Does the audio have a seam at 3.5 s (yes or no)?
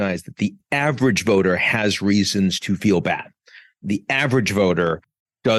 no